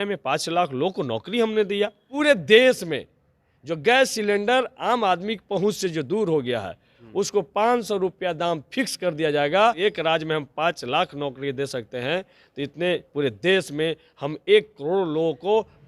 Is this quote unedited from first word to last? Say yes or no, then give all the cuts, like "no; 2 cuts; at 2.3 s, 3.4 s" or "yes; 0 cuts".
no; 2 cuts; at 2.1 s, 9.8 s